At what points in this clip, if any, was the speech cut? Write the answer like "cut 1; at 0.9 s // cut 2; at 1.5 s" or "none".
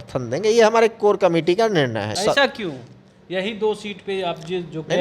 cut 1; at 2.2 s